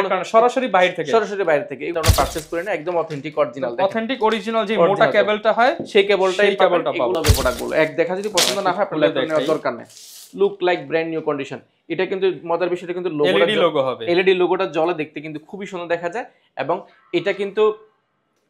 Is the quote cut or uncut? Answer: cut